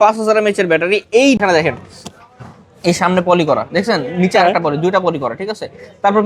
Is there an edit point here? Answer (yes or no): yes